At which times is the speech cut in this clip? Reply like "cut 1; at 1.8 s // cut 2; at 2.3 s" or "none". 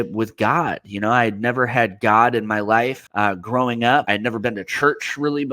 cut 1; at 3.0 s // cut 2; at 4.1 s